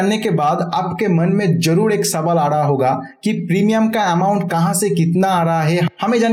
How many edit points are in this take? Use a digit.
0